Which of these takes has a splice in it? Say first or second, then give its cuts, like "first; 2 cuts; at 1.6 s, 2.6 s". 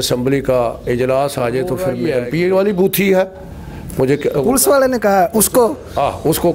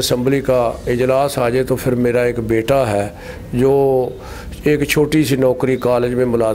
first; 1 cut; at 2.0 s